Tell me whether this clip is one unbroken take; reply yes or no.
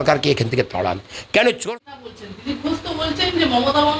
no